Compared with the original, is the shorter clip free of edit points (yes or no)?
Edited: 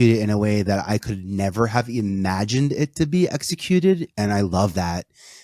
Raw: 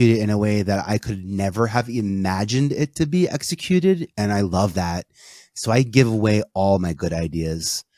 yes